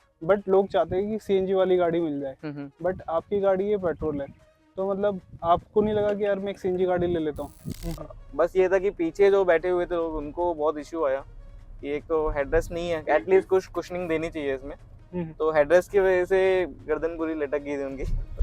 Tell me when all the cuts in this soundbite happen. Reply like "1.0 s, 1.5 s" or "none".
7.6 s